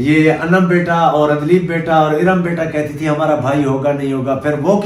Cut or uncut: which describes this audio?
uncut